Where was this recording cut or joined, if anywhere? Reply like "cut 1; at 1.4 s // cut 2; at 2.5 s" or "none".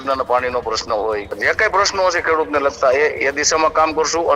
cut 1; at 1.3 s